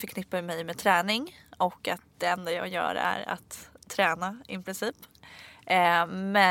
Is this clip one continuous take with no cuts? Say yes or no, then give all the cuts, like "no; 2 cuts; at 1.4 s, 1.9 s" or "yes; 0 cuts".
yes; 0 cuts